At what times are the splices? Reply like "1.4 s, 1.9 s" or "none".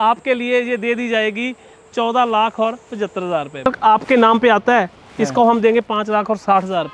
3.6 s